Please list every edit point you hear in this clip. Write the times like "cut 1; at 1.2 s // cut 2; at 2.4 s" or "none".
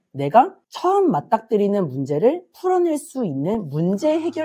none

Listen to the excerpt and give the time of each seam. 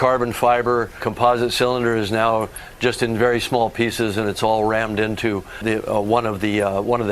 cut 1; at 1.0 s // cut 2; at 5.6 s

